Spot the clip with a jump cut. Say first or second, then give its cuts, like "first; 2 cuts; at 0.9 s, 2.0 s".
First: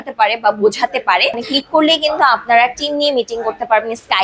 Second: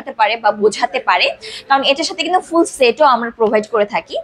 first; 1 cut; at 1.5 s